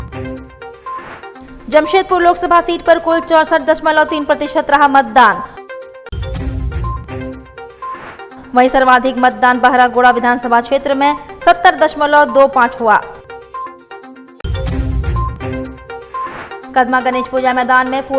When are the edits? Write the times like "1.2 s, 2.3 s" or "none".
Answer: 0.9 s